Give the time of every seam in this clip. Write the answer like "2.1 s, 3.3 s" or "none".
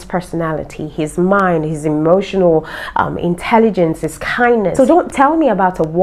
4.7 s